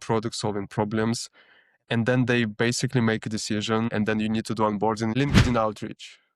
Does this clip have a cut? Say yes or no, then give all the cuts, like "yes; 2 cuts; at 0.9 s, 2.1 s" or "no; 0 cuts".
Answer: yes; 2 cuts; at 3.9 s, 5.1 s